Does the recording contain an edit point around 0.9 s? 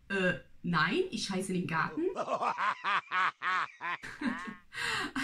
no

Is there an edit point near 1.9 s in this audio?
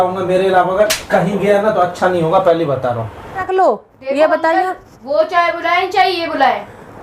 no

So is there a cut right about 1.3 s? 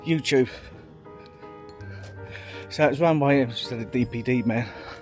no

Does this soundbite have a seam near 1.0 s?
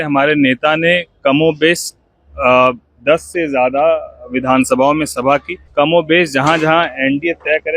no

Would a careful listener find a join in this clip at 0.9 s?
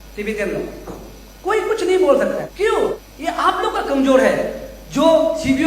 no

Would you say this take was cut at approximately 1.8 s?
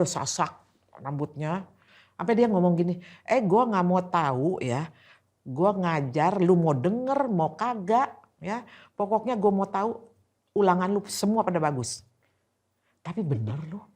yes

